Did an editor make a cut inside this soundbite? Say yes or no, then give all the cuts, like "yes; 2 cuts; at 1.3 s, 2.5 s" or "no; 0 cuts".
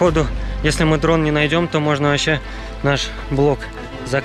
no; 0 cuts